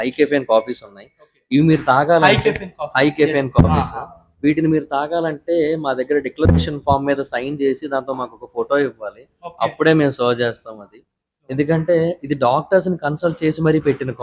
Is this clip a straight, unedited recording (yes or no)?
yes